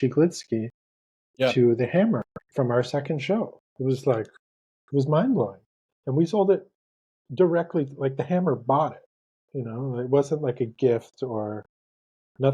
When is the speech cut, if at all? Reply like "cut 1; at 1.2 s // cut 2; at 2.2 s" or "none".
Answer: cut 1; at 5.9 s

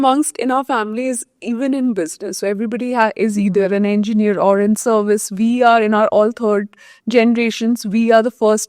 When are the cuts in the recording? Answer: none

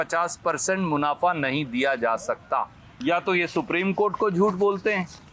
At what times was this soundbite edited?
cut 1; at 2.8 s

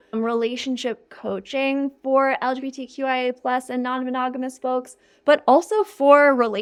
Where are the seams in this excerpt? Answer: none

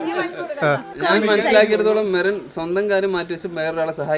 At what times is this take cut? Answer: cut 1; at 0.9 s

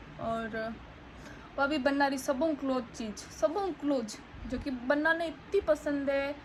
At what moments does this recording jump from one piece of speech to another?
none

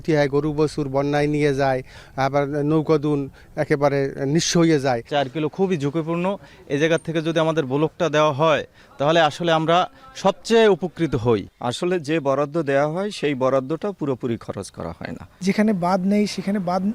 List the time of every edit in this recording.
cut 1; at 5.0 s // cut 2; at 11.5 s // cut 3; at 15.2 s

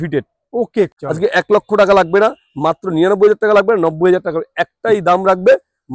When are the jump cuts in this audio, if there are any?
cut 1; at 0.9 s

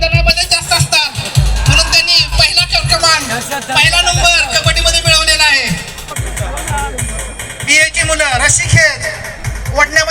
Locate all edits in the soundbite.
cut 1; at 6.0 s

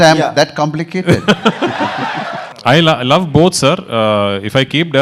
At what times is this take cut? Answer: cut 1; at 2.4 s

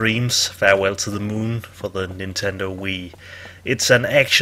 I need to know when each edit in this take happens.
cut 1; at 2.7 s

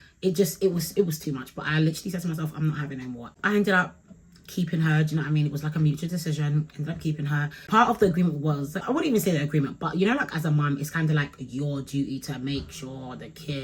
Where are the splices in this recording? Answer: none

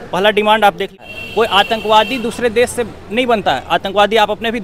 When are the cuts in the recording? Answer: cut 1; at 0.9 s

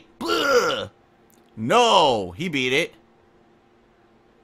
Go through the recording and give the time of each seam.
none

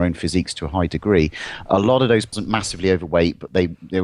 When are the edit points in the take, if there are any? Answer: none

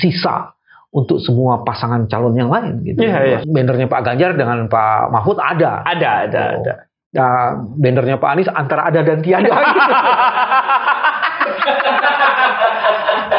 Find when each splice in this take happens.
cut 1; at 3.4 s

